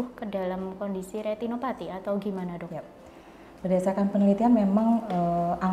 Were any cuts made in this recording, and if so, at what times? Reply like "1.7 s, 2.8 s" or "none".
none